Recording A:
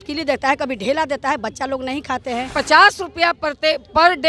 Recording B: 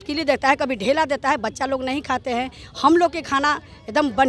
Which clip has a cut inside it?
A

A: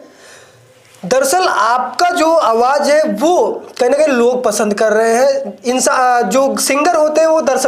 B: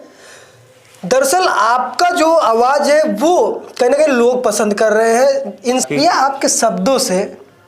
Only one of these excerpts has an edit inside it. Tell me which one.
B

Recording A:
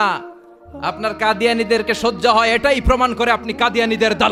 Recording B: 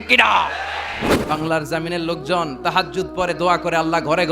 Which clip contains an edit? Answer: B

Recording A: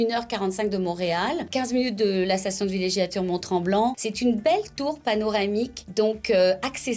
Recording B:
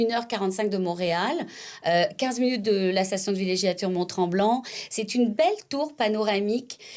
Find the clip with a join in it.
A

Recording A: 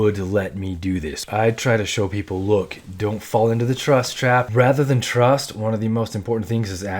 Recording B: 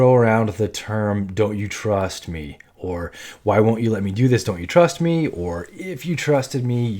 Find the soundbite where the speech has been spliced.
A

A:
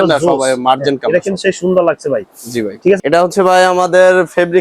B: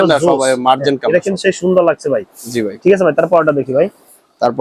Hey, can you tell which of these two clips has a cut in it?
A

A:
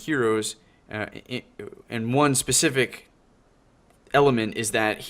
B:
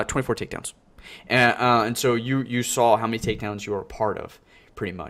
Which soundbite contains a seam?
A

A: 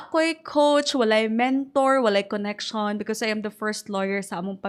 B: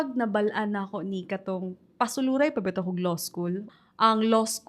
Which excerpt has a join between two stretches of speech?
B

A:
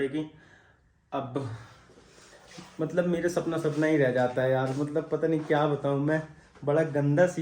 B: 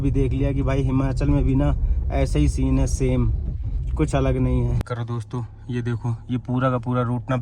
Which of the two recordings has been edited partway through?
B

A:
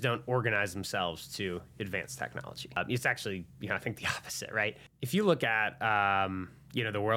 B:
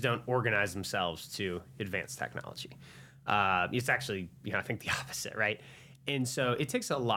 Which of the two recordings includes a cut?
A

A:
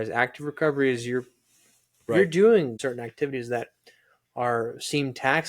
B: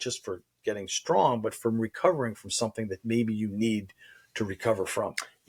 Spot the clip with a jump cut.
A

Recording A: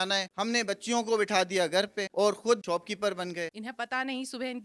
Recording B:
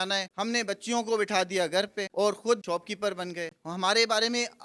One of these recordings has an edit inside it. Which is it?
A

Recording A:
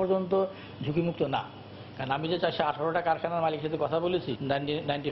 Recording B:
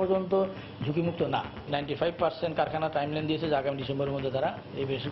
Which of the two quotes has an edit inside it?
B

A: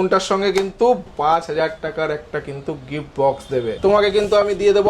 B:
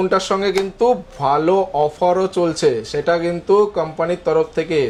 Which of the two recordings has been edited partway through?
A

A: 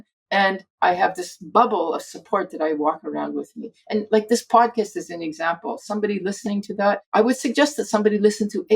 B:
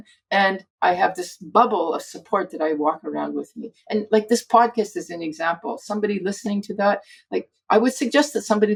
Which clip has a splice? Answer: A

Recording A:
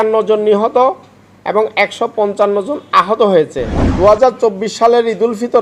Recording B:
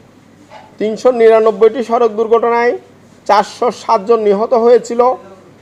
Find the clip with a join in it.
A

